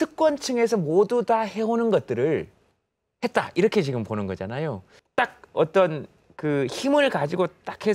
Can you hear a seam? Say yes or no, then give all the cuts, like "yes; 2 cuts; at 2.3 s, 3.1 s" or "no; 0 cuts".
no; 0 cuts